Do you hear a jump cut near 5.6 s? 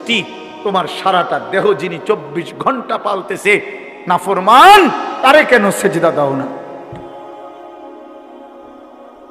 no; 1 cut; at 6.9 s

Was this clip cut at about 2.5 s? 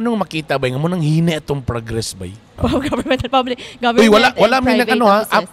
yes; 1 cut; at 2.5 s

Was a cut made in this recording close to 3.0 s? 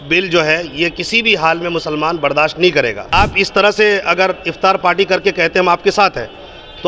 yes; 1 cut; at 3.0 s

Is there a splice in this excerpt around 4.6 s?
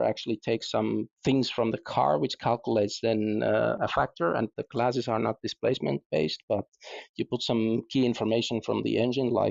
yes; 1 cut; at 4.6 s

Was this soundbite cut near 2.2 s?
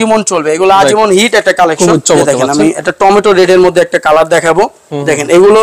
yes; 1 cut; at 2.2 s

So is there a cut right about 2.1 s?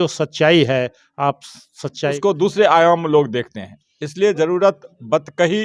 yes; 1 cut; at 2.1 s

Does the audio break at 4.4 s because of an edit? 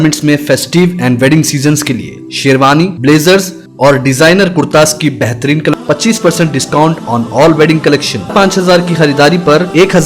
no; 2 cuts; at 5.7 s, 8.3 s

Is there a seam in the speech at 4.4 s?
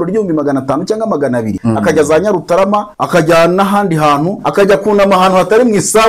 yes; 3 cuts; at 1.6 s, 2.9 s, 4.4 s

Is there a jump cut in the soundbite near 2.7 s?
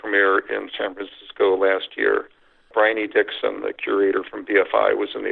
yes; 1 cut; at 2.7 s

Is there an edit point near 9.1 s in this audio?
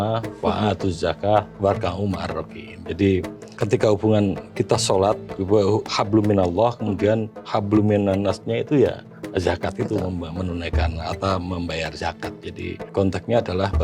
yes; 4 cuts; at 3.5 s, 5.3 s, 9.1 s, 12.9 s

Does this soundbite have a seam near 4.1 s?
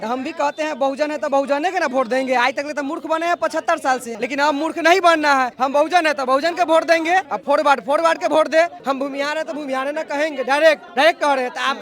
yes; 5 cuts; at 4.1 s, 5.5 s, 7.3 s, 8.8 s, 10.9 s

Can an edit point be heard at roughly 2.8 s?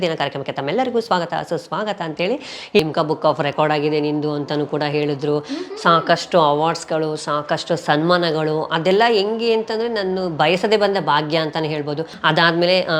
yes; 2 cuts; at 2.8 s, 12.1 s

